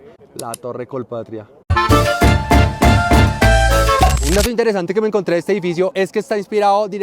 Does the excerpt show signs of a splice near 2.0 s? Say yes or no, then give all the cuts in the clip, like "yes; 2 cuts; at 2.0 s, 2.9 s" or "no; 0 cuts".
no; 1 cut; at 4.1 s